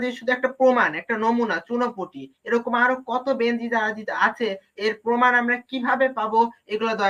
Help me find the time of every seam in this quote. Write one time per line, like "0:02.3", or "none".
none